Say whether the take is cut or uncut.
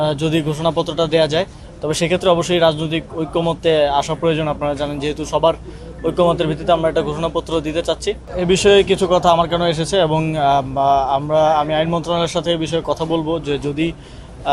cut